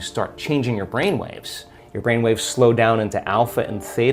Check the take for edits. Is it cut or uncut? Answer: uncut